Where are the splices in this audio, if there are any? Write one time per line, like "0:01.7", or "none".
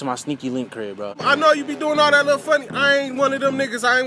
0:01.2